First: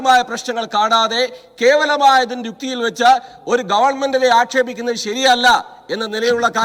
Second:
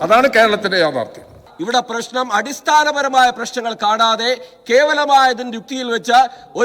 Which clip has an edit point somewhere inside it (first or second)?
second